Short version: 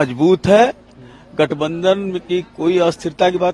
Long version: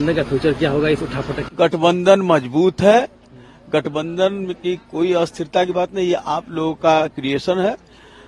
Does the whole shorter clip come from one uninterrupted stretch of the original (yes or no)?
yes